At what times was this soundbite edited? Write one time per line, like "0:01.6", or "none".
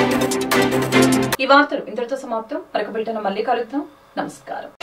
none